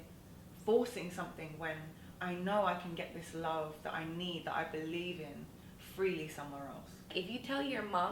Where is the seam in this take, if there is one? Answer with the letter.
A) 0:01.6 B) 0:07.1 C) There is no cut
B